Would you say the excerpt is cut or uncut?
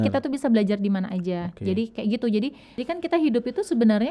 cut